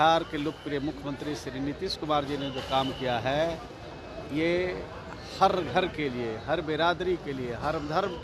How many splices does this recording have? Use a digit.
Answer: 0